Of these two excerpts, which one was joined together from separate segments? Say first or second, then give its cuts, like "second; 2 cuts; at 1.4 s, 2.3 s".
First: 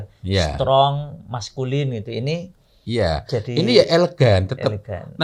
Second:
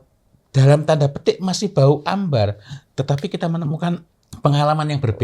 second; 1 cut; at 4.0 s